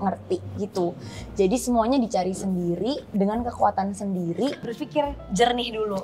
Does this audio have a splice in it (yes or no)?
yes